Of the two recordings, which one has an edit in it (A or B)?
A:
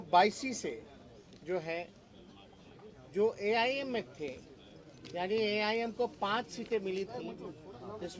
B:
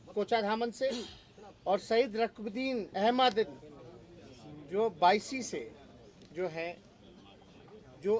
B